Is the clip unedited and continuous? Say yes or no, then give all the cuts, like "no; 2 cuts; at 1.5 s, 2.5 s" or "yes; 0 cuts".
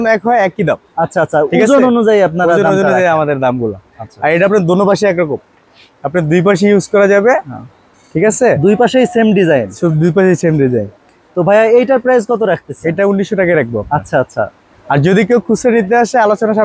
yes; 0 cuts